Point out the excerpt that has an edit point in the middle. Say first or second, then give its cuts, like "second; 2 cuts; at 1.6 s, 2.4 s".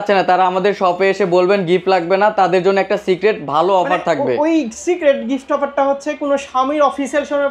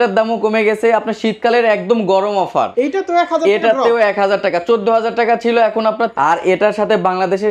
second; 2 cuts; at 2.7 s, 6.1 s